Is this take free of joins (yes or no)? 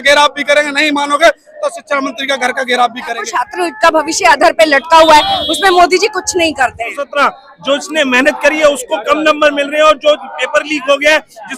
no